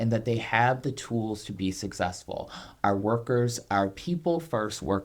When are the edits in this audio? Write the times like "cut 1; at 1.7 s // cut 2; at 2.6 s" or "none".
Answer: cut 1; at 2.6 s